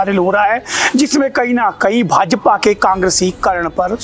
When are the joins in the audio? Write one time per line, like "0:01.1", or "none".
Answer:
none

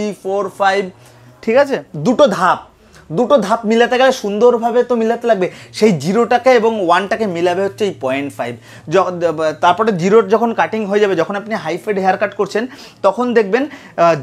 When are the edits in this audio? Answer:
0:01.9

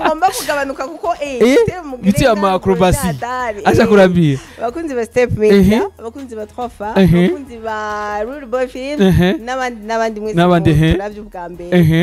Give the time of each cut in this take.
none

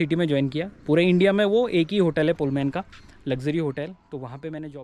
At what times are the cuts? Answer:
none

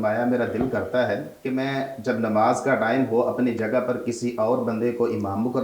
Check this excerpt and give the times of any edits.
0:01.3

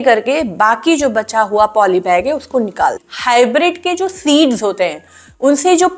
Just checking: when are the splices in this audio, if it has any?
0:03.1

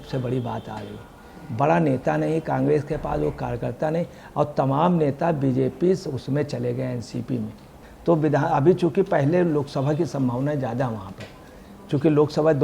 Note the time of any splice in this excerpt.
0:07.7

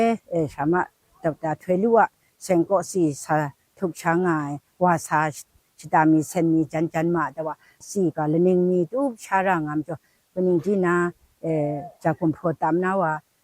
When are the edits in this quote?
0:07.8

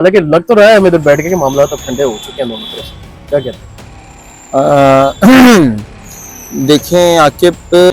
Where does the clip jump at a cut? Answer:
none

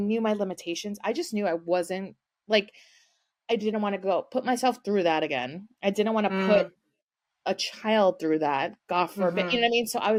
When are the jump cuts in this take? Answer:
none

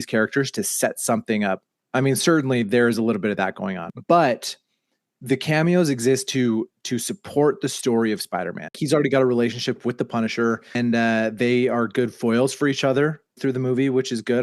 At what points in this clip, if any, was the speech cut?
0:03.9
0:08.8
0:10.7

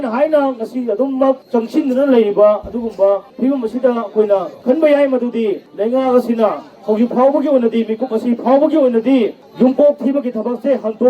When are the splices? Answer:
0:01.4
0:03.3
0:04.5
0:05.7
0:09.4

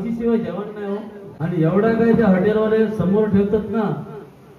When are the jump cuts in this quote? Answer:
0:01.2

